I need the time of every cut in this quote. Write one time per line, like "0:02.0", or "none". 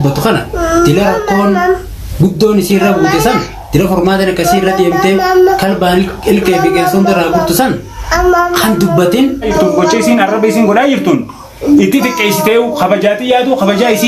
0:09.5